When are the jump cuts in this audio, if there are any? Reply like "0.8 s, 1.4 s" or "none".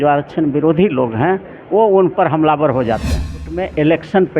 3.5 s